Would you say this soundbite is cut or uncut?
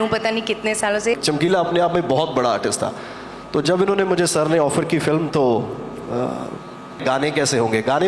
cut